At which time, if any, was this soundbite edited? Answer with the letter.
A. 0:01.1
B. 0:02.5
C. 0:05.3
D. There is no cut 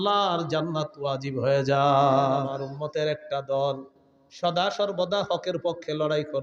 B